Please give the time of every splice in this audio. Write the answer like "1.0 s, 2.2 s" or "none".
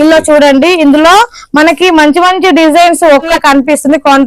3.3 s